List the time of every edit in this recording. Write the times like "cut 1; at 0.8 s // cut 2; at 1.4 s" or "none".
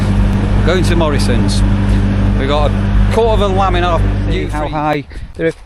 cut 1; at 4.4 s

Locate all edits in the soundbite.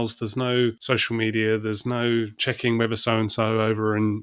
cut 1; at 0.8 s // cut 2; at 2.4 s

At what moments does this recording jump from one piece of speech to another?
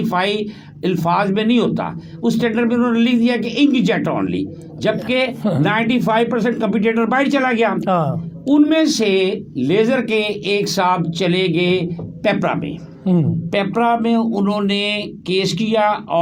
none

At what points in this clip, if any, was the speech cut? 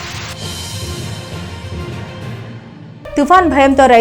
none

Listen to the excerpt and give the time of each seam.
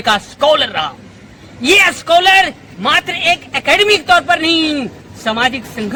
none

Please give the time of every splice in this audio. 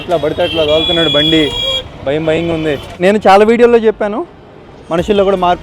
cut 1; at 2.9 s

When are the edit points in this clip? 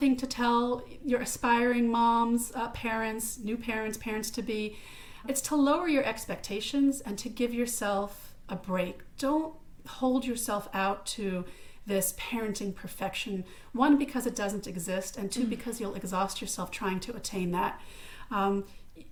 none

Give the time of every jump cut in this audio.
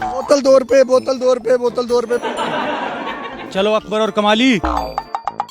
cut 1; at 3.4 s

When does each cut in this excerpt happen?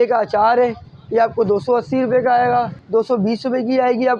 cut 1; at 2.8 s

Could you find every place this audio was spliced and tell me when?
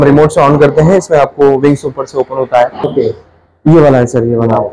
cut 1; at 2.8 s

